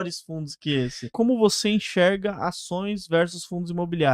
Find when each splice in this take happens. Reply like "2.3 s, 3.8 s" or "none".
1.1 s